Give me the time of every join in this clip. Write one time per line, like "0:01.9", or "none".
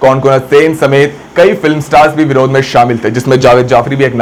none

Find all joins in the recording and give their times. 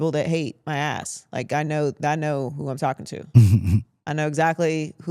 none

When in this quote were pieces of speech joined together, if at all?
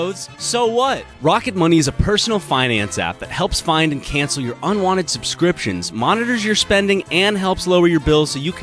none

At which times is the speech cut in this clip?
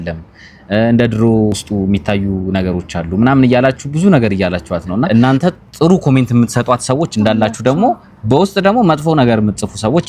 0:01.5
0:05.1

